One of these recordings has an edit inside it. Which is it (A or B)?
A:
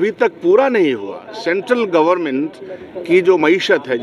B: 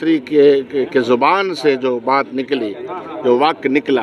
A